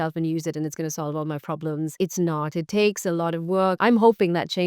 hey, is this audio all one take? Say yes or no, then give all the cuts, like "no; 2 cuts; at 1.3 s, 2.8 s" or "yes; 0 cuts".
no; 1 cut; at 3.8 s